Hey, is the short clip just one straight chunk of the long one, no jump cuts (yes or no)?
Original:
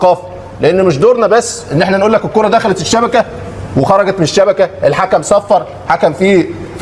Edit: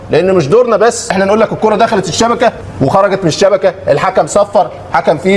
no